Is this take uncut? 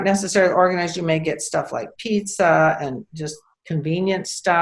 yes; 0 cuts

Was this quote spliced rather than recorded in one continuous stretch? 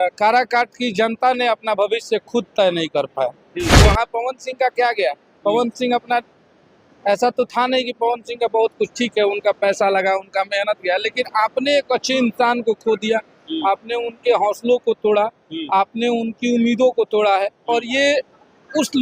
yes; 1 cut; at 3.8 s

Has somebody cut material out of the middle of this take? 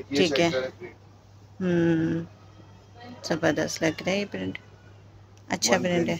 no; 0 cuts

